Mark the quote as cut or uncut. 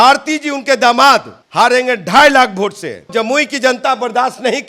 cut